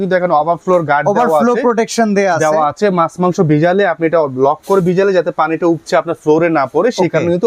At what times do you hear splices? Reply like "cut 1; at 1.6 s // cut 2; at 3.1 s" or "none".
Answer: none